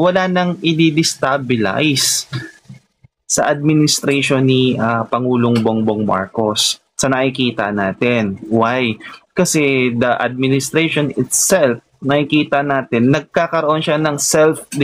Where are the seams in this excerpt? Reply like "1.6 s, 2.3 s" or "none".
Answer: none